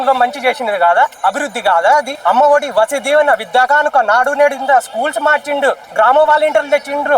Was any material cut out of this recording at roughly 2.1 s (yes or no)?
yes